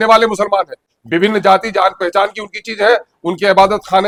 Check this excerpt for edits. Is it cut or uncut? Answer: uncut